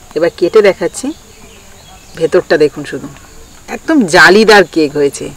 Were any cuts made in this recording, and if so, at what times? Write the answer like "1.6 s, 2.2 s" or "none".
none